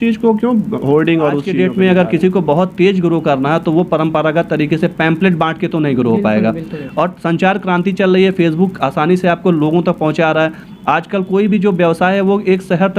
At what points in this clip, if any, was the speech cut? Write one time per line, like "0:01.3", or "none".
0:01.5